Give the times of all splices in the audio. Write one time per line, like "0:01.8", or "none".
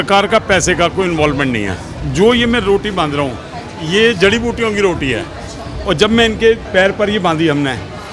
0:02.0
0:06.6